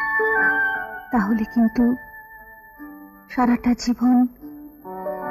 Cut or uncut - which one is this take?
uncut